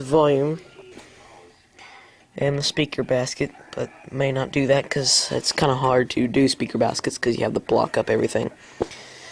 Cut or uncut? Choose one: uncut